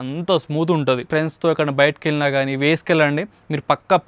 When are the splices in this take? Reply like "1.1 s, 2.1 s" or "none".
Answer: 1.0 s